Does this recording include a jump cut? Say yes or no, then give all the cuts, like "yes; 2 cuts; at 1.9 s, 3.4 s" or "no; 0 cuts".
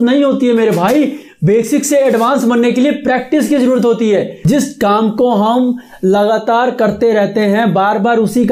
no; 0 cuts